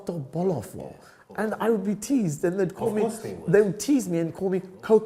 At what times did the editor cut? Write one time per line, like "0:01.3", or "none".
none